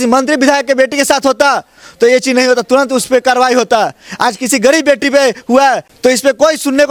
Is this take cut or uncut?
uncut